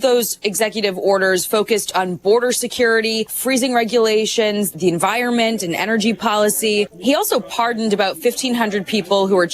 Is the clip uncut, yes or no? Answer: no